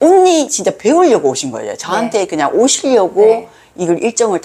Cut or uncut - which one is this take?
uncut